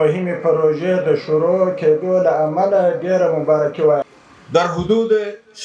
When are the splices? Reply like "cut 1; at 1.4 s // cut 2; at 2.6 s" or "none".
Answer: cut 1; at 4.1 s